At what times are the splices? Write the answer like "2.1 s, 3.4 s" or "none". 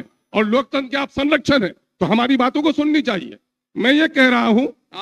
none